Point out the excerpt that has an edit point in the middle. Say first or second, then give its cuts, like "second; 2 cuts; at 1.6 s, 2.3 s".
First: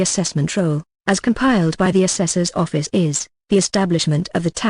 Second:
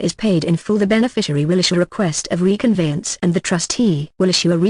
first; 1 cut; at 3.5 s